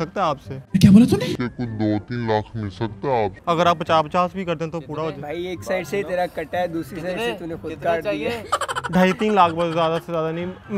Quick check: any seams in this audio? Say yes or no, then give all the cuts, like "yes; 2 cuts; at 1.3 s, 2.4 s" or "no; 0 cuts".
no; 0 cuts